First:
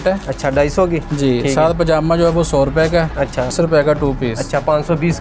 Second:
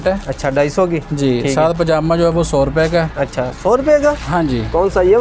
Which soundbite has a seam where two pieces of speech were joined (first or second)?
first